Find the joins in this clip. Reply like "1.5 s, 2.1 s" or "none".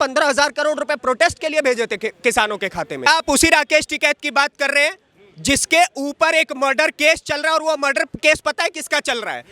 3.0 s